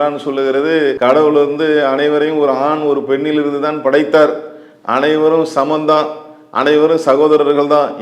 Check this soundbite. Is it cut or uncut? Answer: cut